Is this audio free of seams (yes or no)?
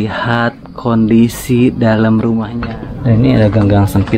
no